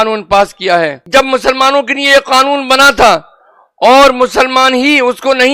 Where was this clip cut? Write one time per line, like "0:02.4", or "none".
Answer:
0:01.0